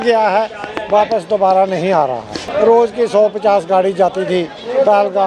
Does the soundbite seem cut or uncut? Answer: cut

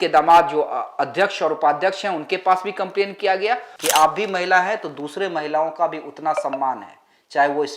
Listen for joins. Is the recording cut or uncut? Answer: cut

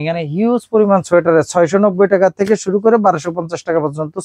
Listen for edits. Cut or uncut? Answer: uncut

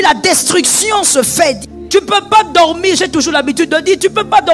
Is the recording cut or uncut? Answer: cut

